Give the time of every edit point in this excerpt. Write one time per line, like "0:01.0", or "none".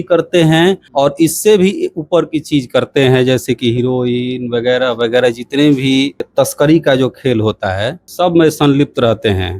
0:00.8
0:06.2
0:08.0